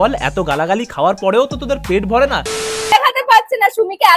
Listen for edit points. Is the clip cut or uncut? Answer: cut